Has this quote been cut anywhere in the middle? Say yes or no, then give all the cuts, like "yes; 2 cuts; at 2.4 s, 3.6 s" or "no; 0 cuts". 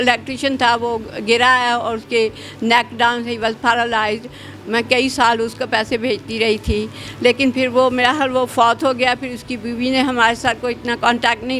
no; 0 cuts